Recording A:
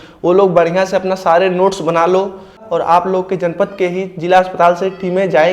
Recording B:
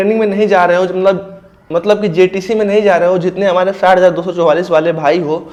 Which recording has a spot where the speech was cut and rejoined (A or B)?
A